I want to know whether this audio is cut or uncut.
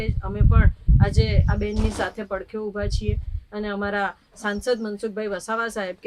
uncut